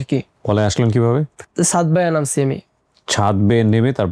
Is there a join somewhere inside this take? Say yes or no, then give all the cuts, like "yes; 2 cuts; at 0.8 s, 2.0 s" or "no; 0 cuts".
no; 0 cuts